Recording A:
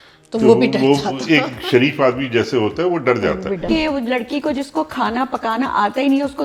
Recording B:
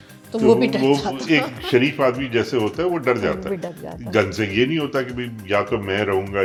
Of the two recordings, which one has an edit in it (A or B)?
A